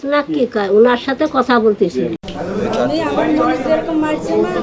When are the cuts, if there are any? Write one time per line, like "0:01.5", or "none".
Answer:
0:02.2